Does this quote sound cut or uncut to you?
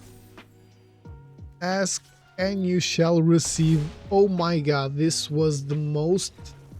cut